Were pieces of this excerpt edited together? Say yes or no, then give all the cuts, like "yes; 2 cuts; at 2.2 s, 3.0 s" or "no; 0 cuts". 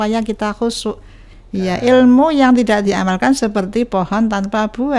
yes; 1 cut; at 1.3 s